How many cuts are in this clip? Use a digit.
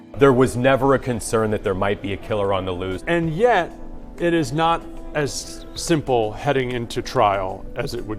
1